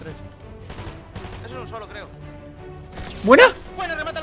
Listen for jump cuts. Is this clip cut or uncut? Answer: uncut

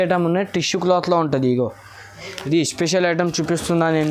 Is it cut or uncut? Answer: cut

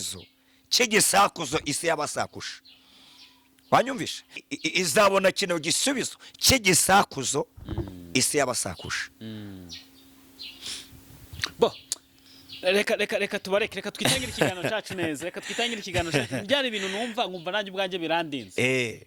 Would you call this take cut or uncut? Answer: cut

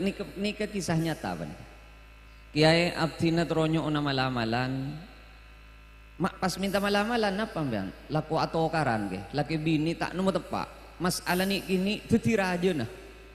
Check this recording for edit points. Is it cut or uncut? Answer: uncut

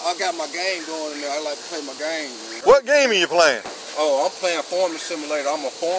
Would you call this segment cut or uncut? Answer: cut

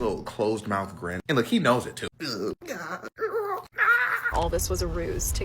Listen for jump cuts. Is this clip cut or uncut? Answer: cut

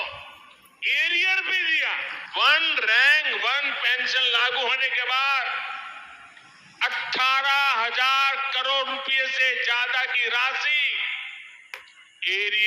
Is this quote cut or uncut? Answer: cut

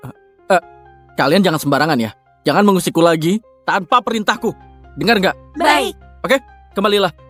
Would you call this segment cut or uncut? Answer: uncut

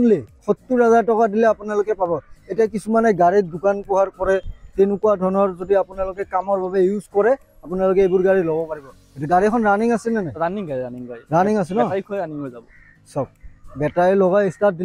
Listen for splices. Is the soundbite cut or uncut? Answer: uncut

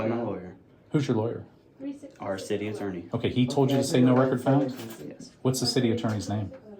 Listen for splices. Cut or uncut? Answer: uncut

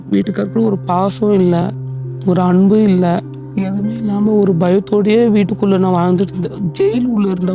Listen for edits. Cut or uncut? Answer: cut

